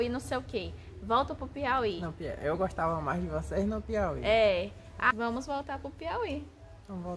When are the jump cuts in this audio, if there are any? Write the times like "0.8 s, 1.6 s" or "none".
5.1 s